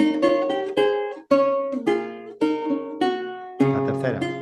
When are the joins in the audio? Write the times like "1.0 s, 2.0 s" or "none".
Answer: none